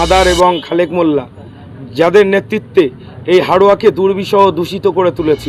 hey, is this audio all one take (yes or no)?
yes